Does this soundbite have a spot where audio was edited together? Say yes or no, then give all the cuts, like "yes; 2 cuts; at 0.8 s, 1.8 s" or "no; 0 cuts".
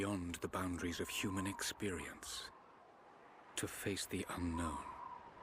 yes; 1 cut; at 2.3 s